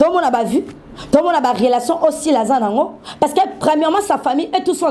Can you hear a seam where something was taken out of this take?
no; 0 cuts

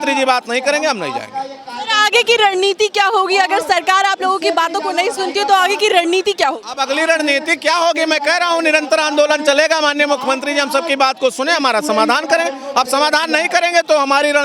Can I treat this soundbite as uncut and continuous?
yes; 0 cuts

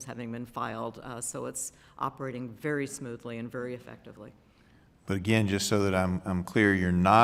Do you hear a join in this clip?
no; 0 cuts

